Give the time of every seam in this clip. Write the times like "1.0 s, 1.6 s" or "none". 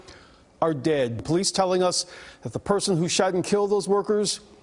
1.2 s